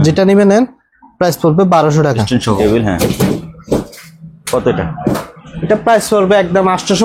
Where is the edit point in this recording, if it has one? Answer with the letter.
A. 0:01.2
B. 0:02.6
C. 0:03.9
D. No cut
B